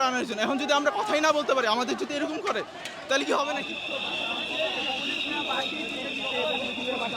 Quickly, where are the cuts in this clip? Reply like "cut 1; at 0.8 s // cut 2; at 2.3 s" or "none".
cut 1; at 3.6 s